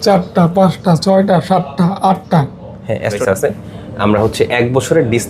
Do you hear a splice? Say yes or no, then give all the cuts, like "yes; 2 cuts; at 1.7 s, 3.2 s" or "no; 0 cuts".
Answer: yes; 1 cut; at 3.2 s